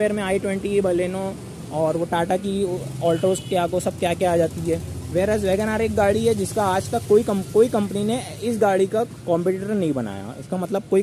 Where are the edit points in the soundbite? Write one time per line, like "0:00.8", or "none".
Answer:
none